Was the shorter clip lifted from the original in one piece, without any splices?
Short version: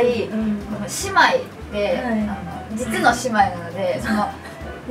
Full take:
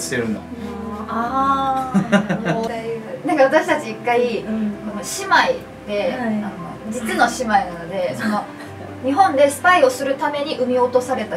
yes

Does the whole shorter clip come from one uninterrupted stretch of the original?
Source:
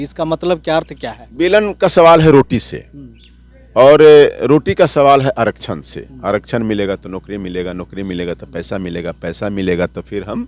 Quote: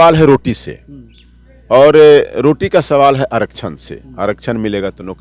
yes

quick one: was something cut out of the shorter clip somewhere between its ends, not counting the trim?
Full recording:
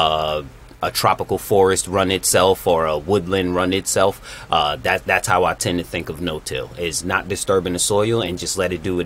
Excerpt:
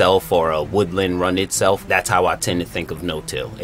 yes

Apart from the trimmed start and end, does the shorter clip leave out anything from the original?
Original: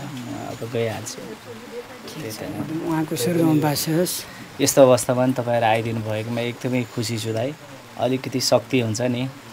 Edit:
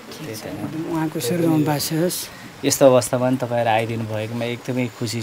no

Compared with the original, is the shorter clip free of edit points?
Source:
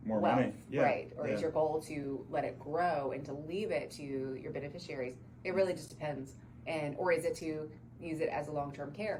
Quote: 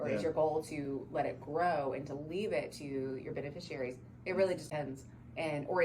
no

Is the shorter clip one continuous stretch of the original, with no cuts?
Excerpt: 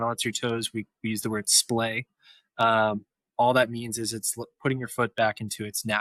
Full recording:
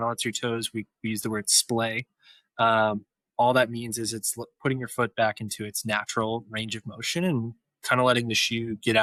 yes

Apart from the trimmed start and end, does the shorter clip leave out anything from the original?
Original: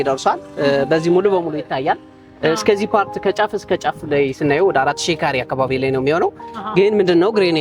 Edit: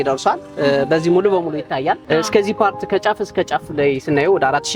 yes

